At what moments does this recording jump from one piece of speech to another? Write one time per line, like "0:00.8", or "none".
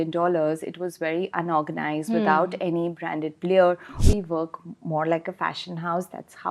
0:04.0